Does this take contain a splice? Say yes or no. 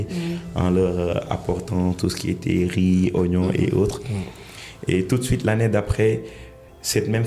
no